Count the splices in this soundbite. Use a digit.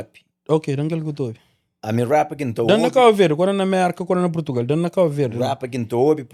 0